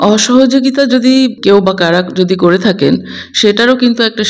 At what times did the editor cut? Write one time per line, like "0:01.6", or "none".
0:01.3